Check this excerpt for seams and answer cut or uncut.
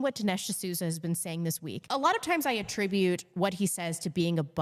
cut